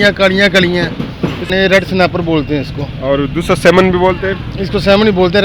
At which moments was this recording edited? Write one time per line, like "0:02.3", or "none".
0:01.5